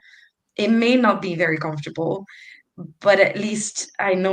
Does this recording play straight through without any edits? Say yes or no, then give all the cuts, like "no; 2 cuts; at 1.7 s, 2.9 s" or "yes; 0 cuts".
yes; 0 cuts